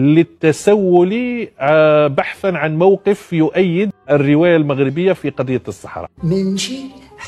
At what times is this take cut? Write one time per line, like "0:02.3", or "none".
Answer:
0:06.1